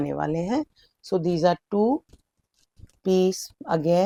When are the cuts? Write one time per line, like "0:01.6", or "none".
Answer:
none